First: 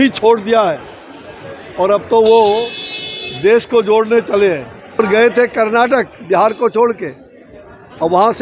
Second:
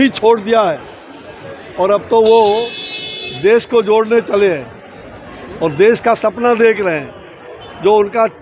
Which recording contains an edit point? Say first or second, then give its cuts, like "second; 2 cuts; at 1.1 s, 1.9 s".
first; 1 cut; at 5.0 s